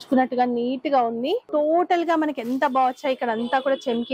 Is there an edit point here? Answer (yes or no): yes